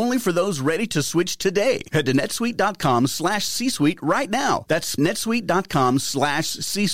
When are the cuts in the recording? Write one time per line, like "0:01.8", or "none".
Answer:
0:04.9

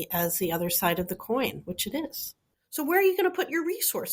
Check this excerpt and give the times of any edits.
0:02.1

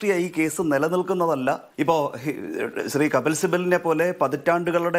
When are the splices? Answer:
0:01.7

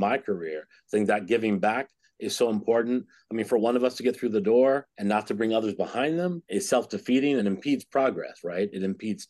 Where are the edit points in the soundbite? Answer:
0:07.4

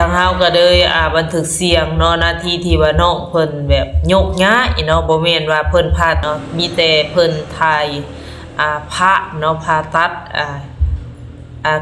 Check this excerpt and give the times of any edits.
0:06.2

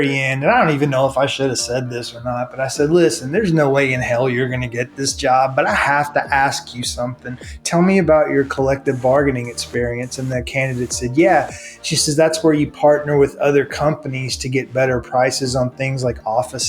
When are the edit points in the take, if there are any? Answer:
none

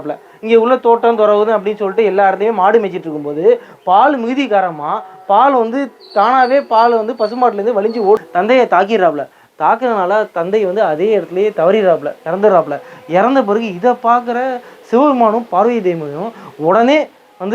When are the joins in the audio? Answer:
0:08.2

